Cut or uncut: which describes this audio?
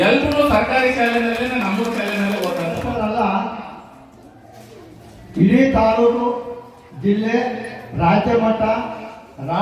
cut